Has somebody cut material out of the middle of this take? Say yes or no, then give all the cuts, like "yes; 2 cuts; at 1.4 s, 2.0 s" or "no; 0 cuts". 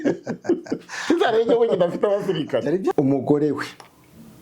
yes; 1 cut; at 2.9 s